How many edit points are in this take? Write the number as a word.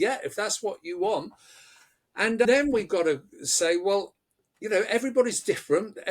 one